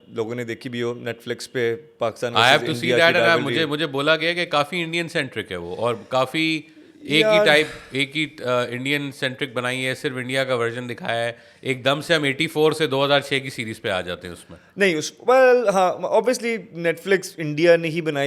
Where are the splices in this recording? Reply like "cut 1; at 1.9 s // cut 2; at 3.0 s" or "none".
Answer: none

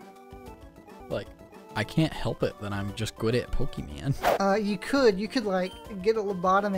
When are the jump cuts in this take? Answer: cut 1; at 1.0 s // cut 2; at 4.2 s

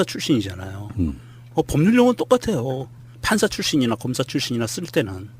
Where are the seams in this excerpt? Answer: cut 1; at 1.2 s

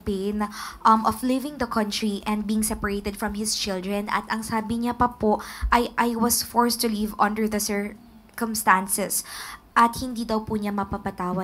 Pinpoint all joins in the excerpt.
none

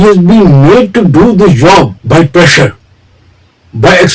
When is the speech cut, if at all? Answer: cut 1; at 2.0 s

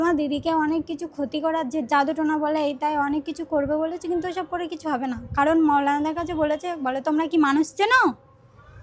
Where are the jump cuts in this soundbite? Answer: none

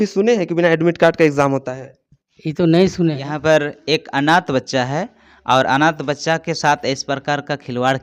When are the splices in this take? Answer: cut 1; at 3.3 s

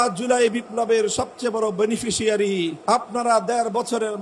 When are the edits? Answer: cut 1; at 2.8 s

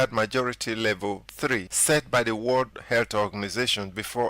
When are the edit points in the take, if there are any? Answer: cut 1; at 1.3 s // cut 2; at 2.8 s

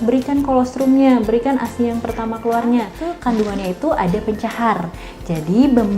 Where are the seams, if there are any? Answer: cut 1; at 3.0 s

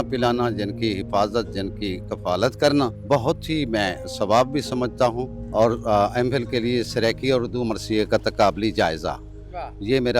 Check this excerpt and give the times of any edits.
cut 1; at 3.0 s // cut 2; at 5.3 s

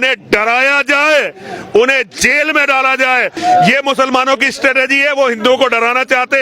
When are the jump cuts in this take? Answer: cut 1; at 3.3 s

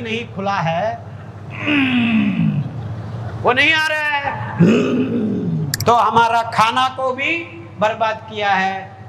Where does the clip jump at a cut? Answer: cut 1; at 5.7 s

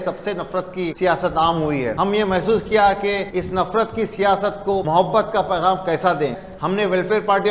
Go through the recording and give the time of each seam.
cut 1; at 0.9 s // cut 2; at 1.9 s // cut 3; at 3.3 s // cut 4; at 4.8 s // cut 5; at 6.5 s

